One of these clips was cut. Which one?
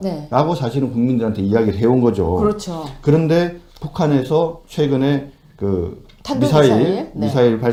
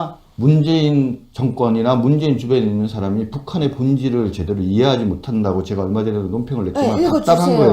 second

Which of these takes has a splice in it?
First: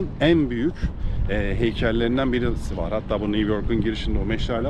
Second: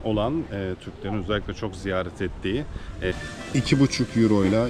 second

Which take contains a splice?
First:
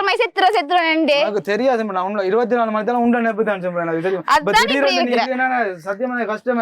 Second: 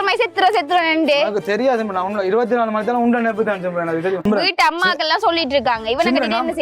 second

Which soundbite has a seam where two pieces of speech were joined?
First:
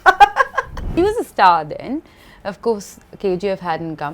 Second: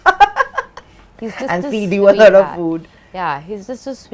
first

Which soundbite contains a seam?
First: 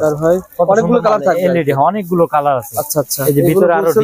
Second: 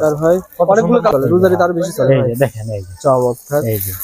second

